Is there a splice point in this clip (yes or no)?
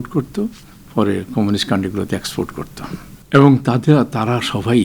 yes